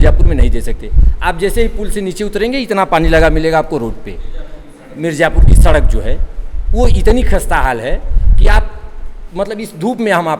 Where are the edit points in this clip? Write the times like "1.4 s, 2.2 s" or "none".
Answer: none